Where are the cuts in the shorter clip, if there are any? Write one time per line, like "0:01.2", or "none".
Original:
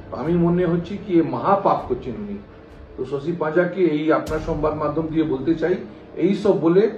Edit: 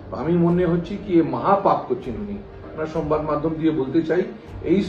0:02.8